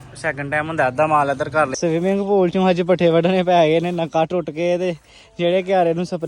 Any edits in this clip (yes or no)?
yes